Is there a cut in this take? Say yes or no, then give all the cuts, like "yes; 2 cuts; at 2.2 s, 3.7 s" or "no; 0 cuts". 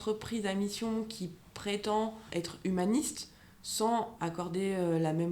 yes; 1 cut; at 4.1 s